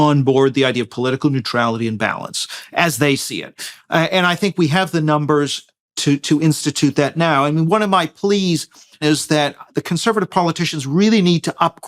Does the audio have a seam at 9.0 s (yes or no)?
yes